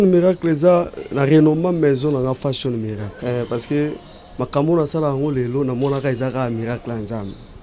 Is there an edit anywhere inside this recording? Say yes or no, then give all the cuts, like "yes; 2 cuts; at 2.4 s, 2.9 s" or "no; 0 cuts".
yes; 1 cut; at 3.1 s